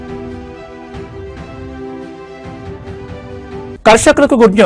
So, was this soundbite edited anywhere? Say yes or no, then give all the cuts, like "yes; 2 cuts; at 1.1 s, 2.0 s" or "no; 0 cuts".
yes; 1 cut; at 3.7 s